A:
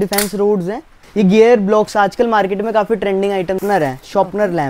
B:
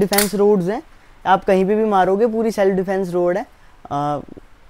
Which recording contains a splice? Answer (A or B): A